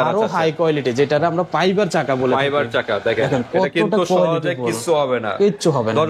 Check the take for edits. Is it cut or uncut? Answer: uncut